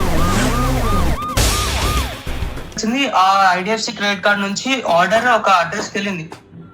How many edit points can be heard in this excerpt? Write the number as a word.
one